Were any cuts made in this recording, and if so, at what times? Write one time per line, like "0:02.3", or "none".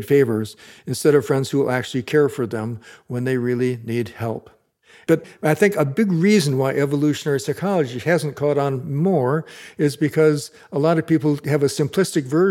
0:05.2

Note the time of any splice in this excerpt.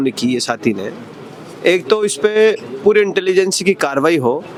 none

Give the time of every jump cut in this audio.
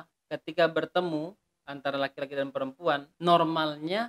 0:03.1

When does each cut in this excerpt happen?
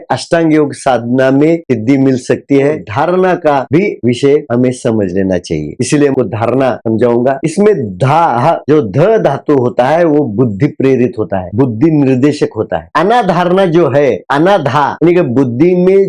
0:02.8
0:06.1

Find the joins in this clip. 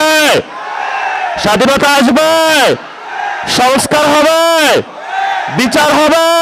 none

